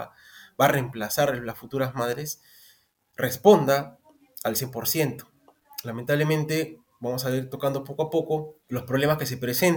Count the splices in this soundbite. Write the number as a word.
one